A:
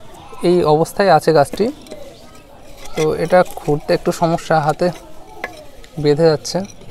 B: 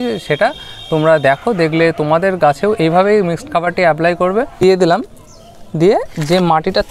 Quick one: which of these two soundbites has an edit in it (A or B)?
B